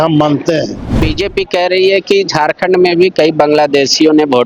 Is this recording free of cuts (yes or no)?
no